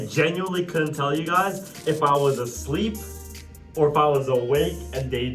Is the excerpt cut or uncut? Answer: uncut